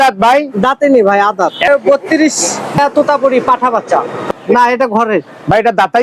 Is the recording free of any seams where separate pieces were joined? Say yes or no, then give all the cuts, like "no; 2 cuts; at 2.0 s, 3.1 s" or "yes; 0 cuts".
no; 3 cuts; at 1.7 s, 2.8 s, 4.2 s